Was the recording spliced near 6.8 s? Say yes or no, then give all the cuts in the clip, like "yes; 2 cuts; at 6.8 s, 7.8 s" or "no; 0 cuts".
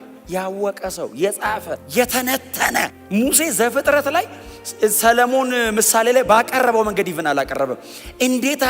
no; 2 cuts; at 1.8 s, 3.0 s